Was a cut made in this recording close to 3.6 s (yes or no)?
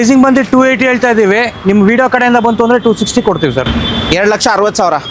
no